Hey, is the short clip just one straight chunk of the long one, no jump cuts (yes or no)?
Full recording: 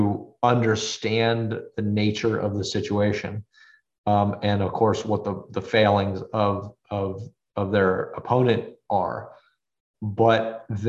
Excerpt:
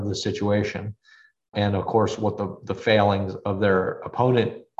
no